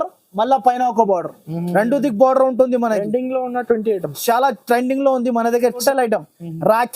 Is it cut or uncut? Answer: cut